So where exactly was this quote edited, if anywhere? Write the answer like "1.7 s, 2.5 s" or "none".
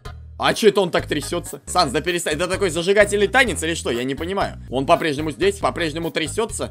1.6 s, 4.6 s, 5.6 s